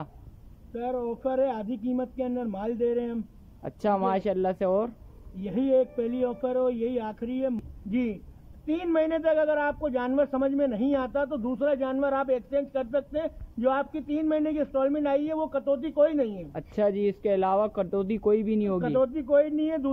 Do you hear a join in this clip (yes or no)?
yes